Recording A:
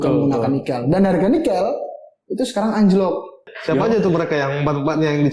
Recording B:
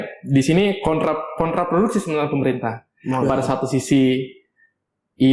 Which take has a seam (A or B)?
A